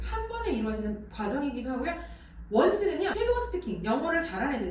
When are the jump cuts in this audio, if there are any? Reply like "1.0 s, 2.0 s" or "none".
1.1 s, 3.1 s

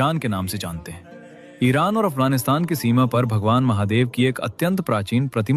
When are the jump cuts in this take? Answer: none

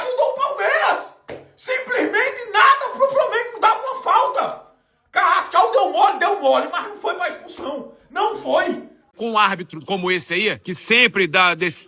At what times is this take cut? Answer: 9.0 s, 10.7 s

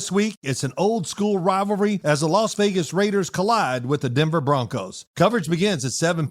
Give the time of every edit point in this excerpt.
5.0 s

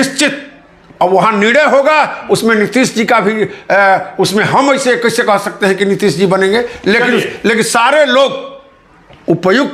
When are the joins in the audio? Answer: none

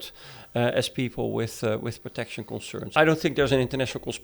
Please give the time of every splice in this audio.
3.0 s

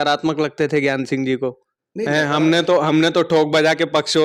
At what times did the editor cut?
none

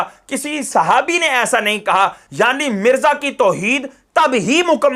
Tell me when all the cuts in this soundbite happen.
2.2 s

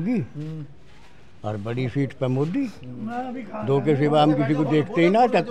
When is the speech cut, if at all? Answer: none

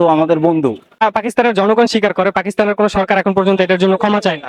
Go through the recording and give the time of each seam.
1.0 s

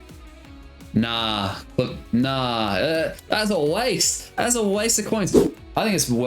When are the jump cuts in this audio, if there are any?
5.4 s

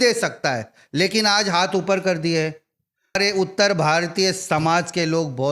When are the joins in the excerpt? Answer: 3.2 s

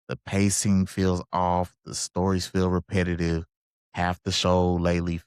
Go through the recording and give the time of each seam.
none

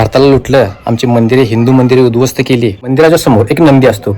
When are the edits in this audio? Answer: 2.8 s

